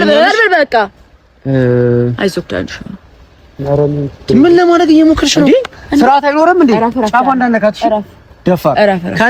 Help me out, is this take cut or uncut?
uncut